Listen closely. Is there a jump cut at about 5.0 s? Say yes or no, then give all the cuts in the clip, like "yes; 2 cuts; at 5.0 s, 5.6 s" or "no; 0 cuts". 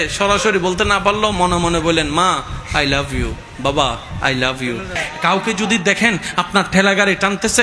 yes; 1 cut; at 5.0 s